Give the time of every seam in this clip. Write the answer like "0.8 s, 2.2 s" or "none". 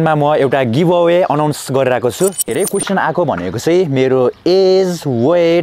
2.5 s